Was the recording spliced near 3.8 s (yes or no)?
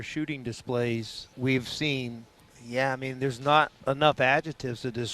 yes